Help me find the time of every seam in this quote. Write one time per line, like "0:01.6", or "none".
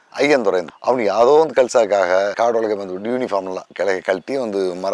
none